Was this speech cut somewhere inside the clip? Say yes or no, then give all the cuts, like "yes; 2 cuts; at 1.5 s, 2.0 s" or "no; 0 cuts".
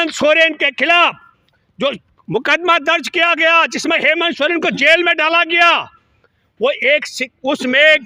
no; 0 cuts